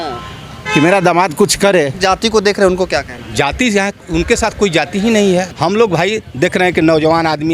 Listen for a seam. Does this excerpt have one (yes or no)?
yes